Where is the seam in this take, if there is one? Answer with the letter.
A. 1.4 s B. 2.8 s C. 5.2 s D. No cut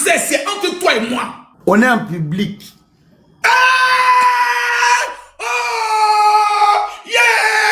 A